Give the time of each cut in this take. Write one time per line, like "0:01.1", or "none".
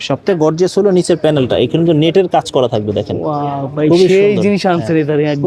none